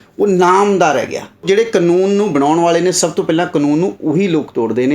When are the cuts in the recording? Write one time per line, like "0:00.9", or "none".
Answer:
0:01.4